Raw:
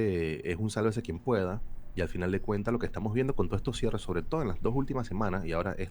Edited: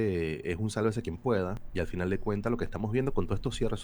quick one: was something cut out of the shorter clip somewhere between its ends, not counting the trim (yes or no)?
yes